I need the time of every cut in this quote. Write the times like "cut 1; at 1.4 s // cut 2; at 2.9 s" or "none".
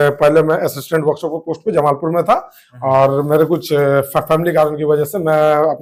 none

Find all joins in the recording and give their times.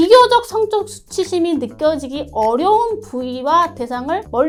none

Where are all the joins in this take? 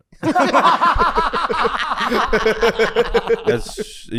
none

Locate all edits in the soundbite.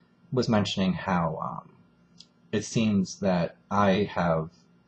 none

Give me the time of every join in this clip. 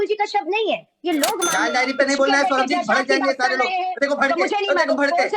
cut 1; at 1.5 s

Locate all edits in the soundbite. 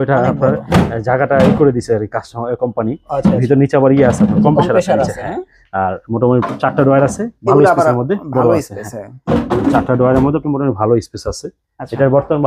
none

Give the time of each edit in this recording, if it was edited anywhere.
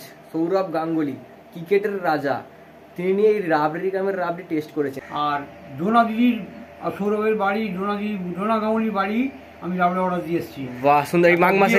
cut 1; at 5.0 s

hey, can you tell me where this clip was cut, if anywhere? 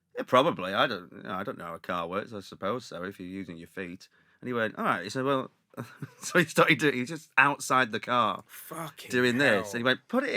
none

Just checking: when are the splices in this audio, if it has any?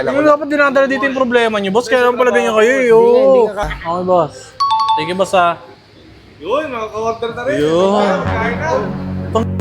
cut 1; at 3.6 s

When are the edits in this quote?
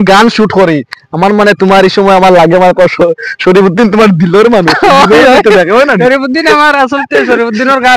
none

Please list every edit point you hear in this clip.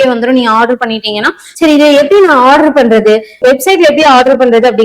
cut 1; at 1.4 s

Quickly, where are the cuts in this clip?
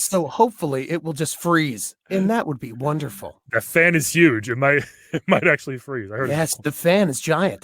none

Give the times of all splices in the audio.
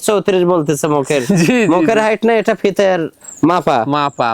none

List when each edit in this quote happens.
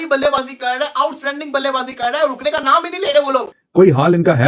cut 1; at 3.6 s

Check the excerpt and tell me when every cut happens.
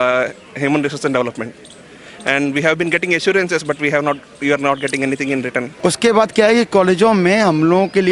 cut 1; at 5.7 s

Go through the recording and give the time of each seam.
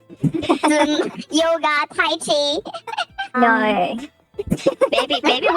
cut 1; at 3.3 s

